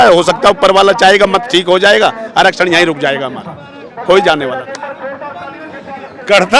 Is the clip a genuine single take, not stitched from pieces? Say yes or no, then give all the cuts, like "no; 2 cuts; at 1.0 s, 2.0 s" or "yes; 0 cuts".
yes; 0 cuts